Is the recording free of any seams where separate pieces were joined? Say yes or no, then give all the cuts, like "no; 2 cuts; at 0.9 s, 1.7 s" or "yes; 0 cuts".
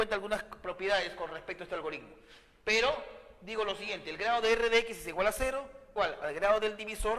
yes; 0 cuts